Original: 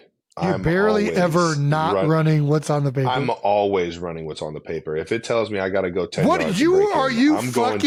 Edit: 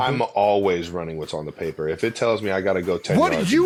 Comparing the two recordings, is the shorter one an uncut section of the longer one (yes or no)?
yes